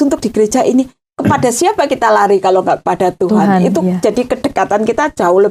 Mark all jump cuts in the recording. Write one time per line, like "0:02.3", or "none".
none